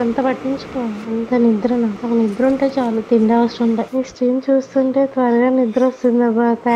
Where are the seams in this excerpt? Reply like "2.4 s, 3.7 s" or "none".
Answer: 1.0 s, 2.0 s, 3.9 s